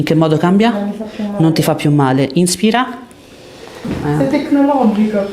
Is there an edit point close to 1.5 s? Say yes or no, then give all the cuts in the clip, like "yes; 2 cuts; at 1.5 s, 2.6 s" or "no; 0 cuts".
no; 1 cut; at 3.9 s